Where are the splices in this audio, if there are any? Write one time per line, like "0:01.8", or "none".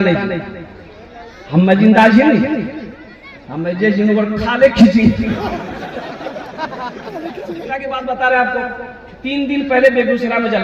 0:07.7